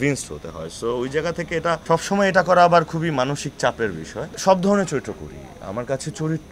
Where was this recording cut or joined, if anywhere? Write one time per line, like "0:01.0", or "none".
0:04.3